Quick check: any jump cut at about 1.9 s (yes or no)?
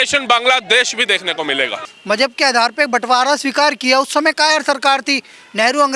yes